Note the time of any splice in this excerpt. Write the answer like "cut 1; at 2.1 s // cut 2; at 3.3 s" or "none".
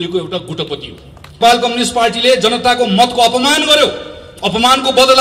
cut 1; at 1.4 s